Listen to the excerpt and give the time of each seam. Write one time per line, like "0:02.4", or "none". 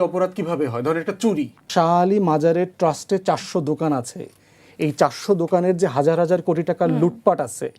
0:01.7